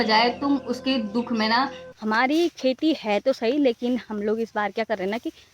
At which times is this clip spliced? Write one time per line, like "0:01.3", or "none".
0:01.9